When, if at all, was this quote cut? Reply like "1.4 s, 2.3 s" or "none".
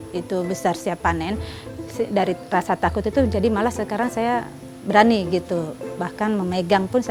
none